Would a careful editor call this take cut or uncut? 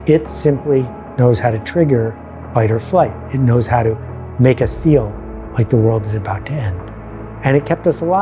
uncut